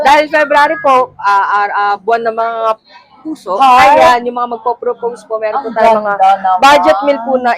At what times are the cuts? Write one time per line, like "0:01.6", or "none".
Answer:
none

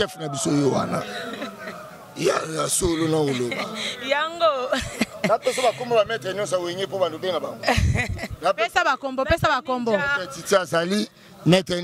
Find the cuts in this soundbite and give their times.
none

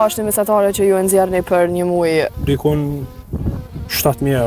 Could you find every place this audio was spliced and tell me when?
0:02.3

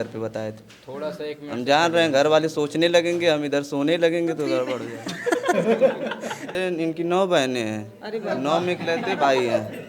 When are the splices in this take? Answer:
0:06.6

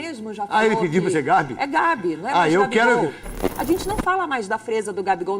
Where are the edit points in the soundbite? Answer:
0:03.4

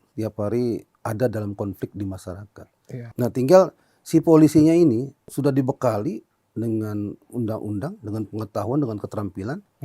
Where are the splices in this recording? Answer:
0:00.9
0:03.0
0:05.2

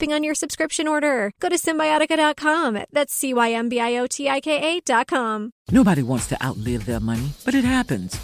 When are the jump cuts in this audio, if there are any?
0:05.5

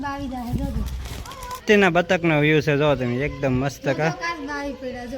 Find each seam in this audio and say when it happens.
0:01.6

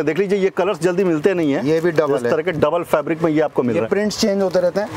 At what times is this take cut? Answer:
0:03.9

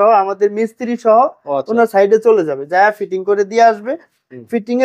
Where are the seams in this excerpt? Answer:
none

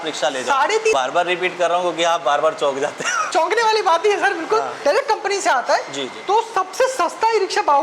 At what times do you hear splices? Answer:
0:00.9
0:03.1
0:04.7

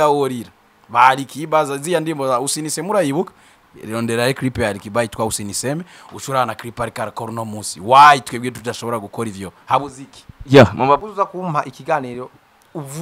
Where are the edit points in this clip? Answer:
0:11.0

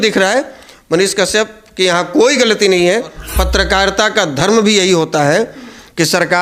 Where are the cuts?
0:03.2

